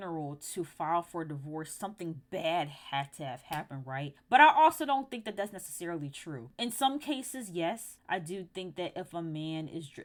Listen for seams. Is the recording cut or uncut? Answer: uncut